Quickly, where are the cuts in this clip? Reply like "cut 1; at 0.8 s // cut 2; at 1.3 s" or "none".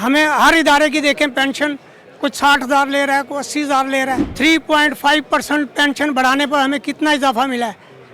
cut 1; at 4.3 s